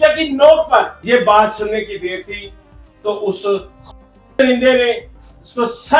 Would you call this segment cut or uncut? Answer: cut